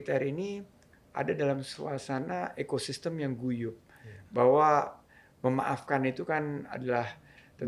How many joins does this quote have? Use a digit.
0